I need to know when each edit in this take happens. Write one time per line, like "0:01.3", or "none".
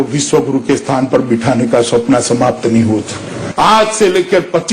0:03.4

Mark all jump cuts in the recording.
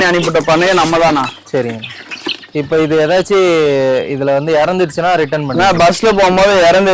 none

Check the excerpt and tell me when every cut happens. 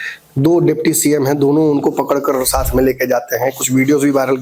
none

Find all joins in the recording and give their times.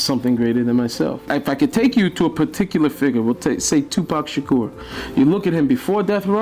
0:01.3

